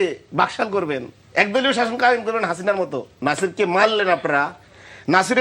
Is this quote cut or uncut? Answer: cut